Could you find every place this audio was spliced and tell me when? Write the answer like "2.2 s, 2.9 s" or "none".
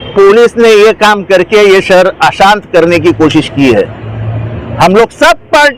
none